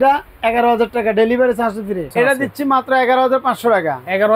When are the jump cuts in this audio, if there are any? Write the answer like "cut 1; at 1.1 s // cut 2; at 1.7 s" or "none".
cut 1; at 2.1 s